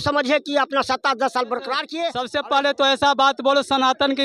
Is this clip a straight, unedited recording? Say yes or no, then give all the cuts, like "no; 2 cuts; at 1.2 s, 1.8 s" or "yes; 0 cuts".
no; 1 cut; at 2.2 s